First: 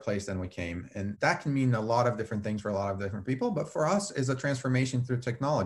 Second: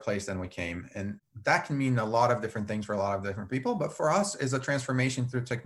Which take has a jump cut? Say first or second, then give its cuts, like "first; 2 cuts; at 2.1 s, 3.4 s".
first; 1 cut; at 1.1 s